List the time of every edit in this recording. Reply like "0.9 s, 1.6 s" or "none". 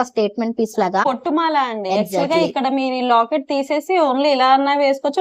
1.0 s